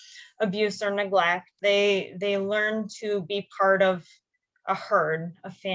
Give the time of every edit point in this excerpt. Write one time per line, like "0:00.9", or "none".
0:01.5